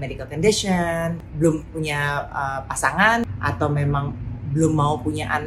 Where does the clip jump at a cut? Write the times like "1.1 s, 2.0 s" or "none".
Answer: 1.2 s, 3.2 s